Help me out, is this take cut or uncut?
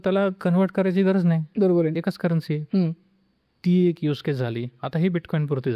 uncut